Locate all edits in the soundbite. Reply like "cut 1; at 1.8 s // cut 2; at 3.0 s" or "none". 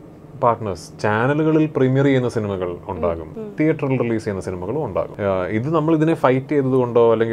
cut 1; at 3.3 s // cut 2; at 5.1 s